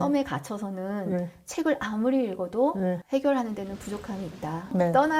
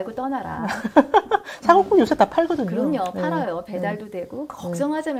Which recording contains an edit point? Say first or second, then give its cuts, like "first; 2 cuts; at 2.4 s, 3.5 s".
first; 1 cut; at 3.0 s